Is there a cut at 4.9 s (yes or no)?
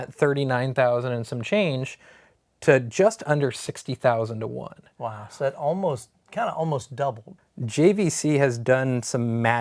no